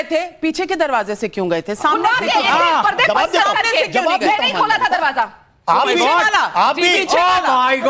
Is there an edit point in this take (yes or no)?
no